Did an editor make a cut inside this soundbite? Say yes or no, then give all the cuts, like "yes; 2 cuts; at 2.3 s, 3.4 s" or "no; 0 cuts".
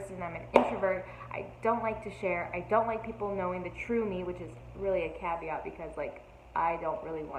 no; 0 cuts